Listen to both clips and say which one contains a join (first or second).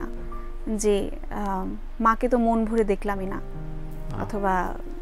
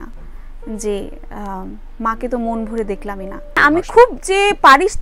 second